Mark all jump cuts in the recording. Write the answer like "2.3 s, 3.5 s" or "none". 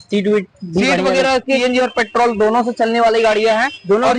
1.6 s